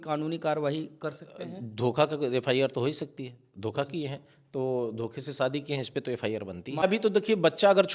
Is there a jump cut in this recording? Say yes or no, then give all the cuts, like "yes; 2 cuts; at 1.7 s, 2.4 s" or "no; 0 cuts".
yes; 1 cut; at 6.8 s